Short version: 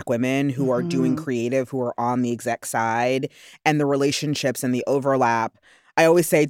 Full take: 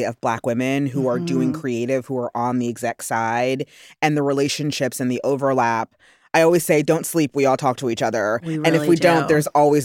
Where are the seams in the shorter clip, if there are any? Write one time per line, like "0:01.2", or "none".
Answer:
none

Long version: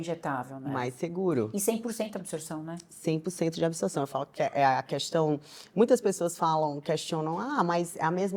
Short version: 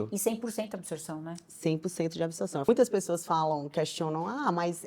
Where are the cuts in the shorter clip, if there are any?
0:02.6

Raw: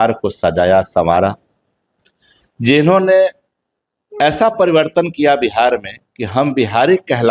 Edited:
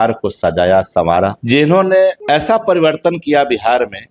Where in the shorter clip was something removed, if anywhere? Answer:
0:01.4
0:02.2

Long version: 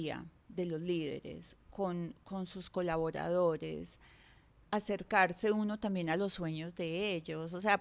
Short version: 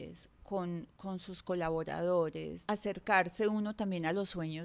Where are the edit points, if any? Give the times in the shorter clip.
0:02.5

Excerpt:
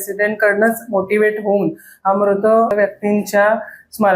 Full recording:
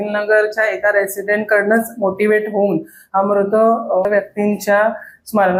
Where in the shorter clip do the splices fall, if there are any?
0:02.7

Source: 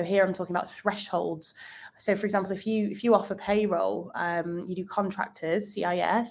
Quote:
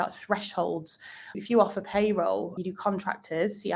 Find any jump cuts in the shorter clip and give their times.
0:01.4
0:02.6

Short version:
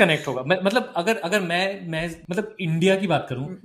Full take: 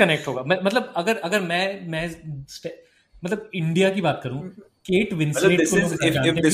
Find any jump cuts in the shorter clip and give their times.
0:02.2

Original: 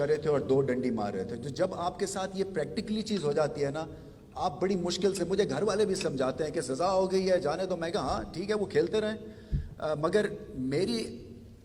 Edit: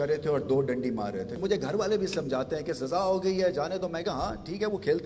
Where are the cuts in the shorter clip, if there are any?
0:01.4

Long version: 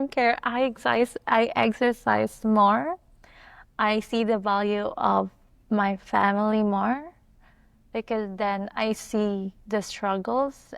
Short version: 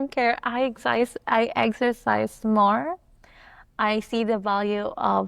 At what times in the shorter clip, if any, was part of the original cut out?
none

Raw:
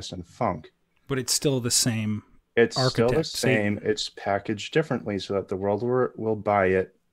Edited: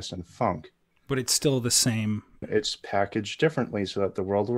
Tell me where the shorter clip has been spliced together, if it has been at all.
0:02.4

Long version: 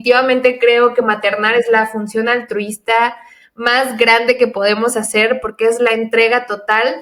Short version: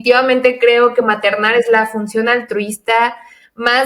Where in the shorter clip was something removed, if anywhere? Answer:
none

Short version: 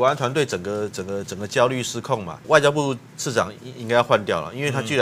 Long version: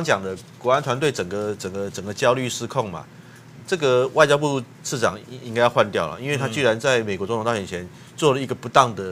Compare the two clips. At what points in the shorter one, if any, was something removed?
0:02.4

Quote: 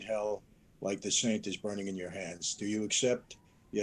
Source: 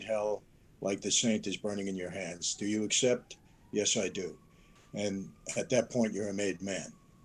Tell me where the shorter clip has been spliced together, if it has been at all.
none

